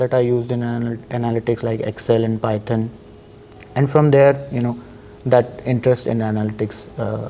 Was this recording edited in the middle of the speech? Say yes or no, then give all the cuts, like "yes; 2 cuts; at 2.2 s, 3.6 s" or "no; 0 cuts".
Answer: no; 0 cuts